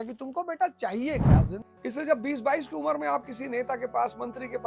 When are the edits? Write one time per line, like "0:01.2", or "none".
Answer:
0:01.6